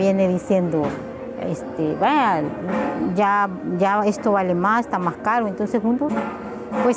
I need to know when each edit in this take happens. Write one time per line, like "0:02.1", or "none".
none